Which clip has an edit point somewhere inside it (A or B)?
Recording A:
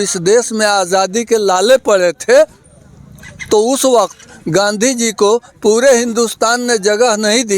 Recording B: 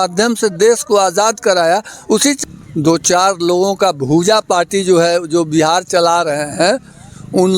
B